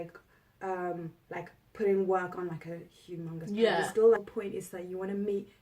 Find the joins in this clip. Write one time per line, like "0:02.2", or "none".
0:04.2